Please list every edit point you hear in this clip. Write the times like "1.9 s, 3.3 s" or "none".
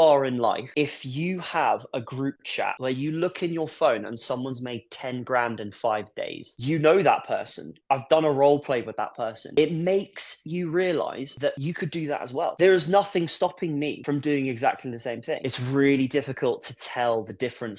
15.4 s